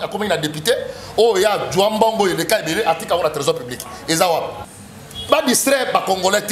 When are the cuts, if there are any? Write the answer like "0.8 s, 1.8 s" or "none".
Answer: 4.7 s